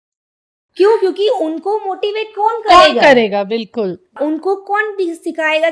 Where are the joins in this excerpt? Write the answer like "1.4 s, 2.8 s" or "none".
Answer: 4.1 s